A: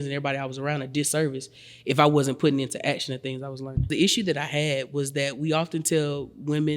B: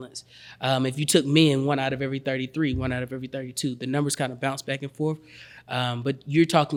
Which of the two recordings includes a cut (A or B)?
A